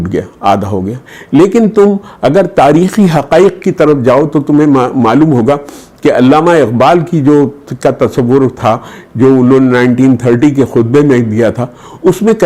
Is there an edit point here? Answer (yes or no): no